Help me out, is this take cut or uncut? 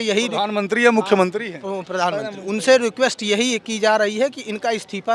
uncut